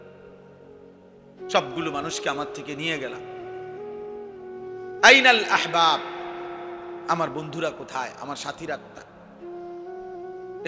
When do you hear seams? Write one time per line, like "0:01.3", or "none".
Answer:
0:01.5